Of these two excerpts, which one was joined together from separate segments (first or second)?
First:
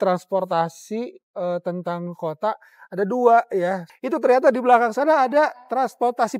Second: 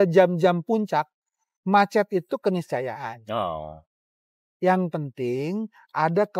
first